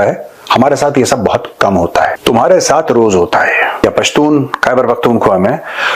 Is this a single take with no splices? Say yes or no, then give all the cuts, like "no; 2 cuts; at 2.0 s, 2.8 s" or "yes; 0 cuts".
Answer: no; 2 cuts; at 2.2 s, 3.8 s